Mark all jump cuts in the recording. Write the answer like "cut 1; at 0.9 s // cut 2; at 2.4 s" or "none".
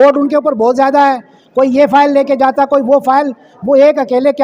none